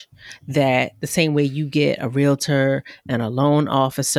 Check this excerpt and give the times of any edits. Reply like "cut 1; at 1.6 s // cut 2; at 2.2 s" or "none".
none